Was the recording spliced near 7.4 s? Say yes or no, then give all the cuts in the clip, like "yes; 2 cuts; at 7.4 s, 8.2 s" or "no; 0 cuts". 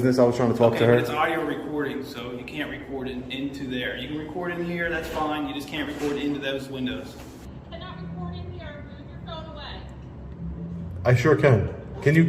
yes; 1 cut; at 7.4 s